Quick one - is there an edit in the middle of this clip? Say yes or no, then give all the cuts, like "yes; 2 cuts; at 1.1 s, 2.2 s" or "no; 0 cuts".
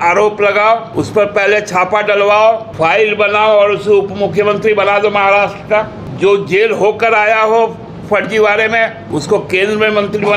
yes; 4 cuts; at 0.9 s, 2.7 s, 6.0 s, 9.0 s